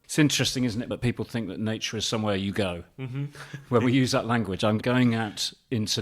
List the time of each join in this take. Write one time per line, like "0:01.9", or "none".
0:00.9
0:04.8

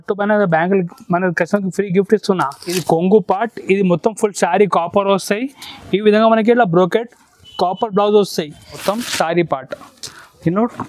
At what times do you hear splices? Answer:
0:02.8
0:08.8

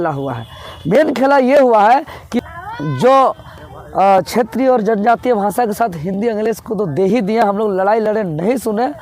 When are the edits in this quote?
0:02.2

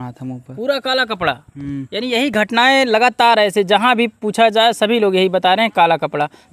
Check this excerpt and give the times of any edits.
none

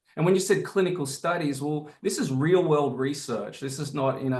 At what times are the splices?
none

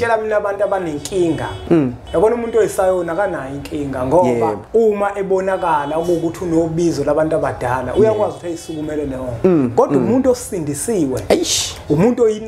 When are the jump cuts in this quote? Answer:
0:01.8
0:04.6

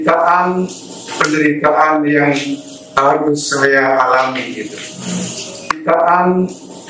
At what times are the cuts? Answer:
0:05.8

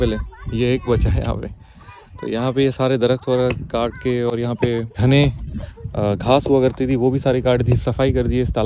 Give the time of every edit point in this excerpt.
none

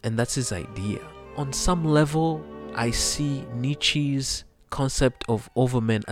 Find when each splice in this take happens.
0:01.2
0:02.6

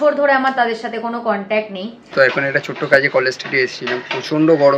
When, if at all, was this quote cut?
0:02.0

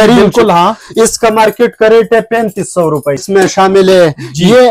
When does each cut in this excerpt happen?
0:03.2

